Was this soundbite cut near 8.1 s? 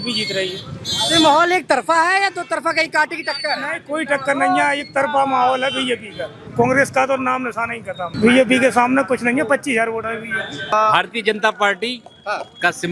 yes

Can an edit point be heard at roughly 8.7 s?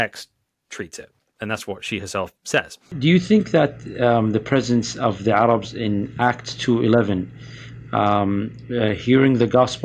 no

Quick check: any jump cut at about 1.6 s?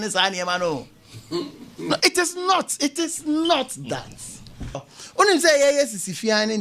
no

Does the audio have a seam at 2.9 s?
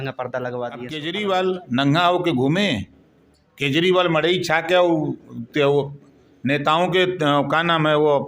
no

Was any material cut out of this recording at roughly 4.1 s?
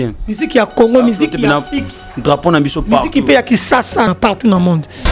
yes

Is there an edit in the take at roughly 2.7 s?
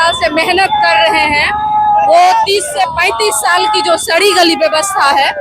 no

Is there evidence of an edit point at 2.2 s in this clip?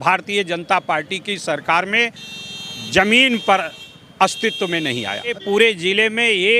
no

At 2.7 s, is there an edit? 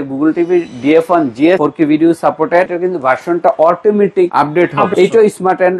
yes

